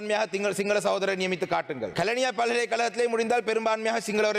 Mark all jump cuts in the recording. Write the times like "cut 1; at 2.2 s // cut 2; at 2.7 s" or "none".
cut 1; at 1.9 s